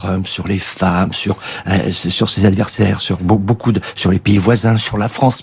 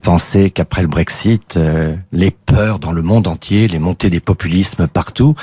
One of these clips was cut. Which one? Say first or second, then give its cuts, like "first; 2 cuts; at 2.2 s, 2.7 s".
first; 1 cut; at 1.6 s